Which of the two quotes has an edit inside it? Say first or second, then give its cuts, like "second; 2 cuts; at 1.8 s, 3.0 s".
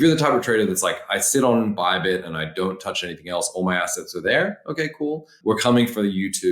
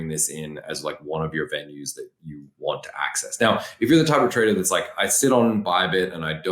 first; 1 cut; at 5.3 s